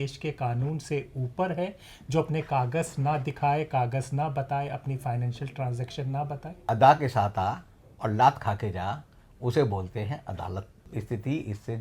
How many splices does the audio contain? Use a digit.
2